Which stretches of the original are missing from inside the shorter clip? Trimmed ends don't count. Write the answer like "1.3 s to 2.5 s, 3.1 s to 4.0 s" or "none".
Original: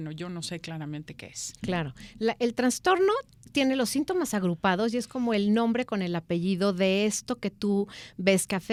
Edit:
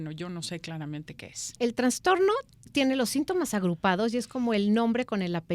1.6 s to 2.4 s